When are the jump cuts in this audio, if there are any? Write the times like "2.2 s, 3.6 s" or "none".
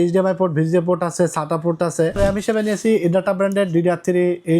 2.2 s